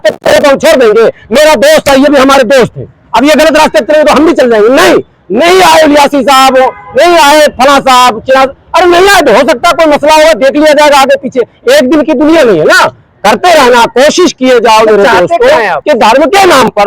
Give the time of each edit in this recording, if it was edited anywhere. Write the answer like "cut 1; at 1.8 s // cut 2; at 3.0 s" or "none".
cut 1; at 15.8 s